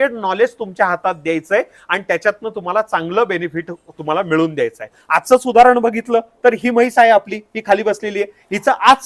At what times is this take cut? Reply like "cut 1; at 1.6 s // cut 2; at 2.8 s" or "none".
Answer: cut 1; at 5.0 s